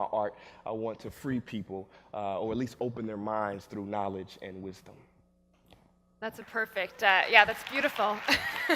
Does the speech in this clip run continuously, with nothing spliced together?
no; 1 cut; at 7.6 s

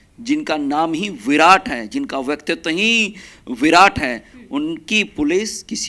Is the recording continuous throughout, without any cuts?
yes; 0 cuts

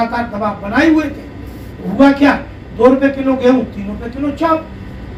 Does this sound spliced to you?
no; 0 cuts

